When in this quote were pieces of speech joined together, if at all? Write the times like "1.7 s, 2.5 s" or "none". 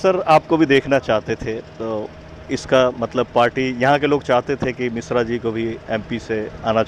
none

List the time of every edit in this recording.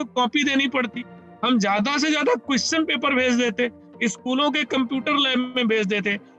none

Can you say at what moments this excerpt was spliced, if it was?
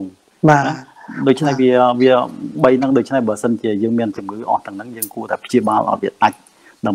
none

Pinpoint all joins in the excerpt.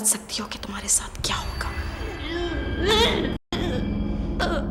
none

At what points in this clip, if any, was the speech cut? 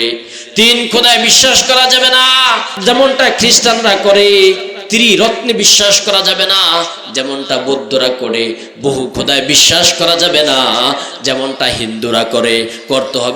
2.8 s

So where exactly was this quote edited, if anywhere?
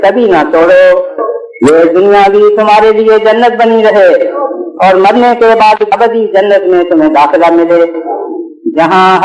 5.9 s

